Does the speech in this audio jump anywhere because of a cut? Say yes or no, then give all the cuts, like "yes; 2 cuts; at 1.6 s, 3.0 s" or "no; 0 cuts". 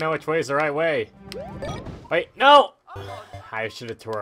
yes; 1 cut; at 1.6 s